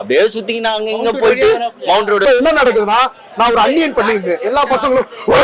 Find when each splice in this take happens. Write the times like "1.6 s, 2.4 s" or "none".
2.2 s

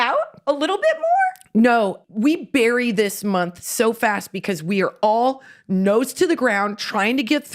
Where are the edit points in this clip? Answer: 2.0 s

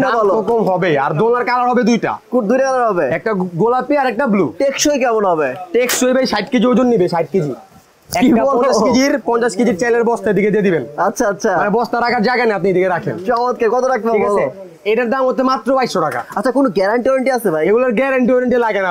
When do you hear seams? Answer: none

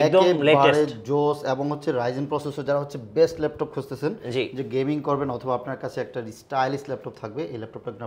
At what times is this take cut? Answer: none

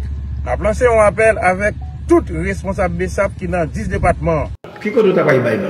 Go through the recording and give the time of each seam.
4.6 s

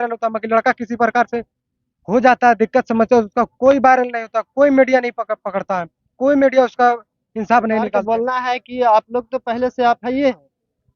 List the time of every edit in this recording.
8.0 s

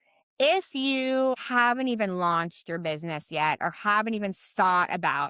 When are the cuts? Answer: 1.4 s

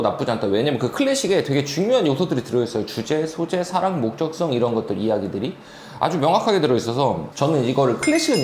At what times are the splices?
7.3 s

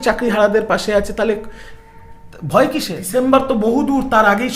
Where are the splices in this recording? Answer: 3.0 s

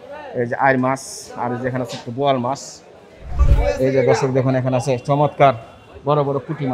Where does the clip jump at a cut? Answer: 3.4 s

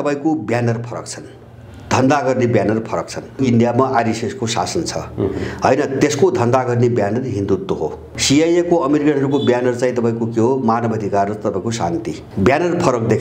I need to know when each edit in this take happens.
3.4 s, 8.1 s, 12.2 s

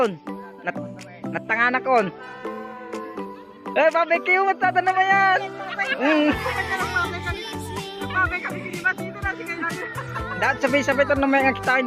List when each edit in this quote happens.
none

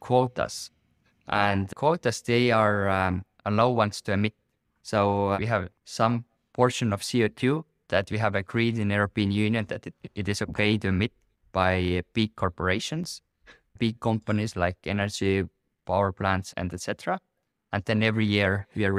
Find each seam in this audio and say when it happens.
none

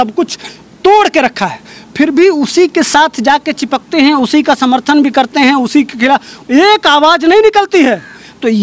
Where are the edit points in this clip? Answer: none

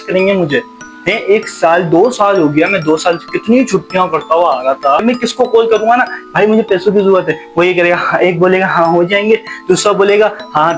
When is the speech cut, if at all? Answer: 5.0 s

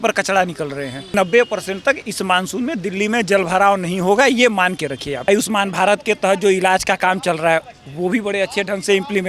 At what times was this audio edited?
1.1 s, 5.3 s

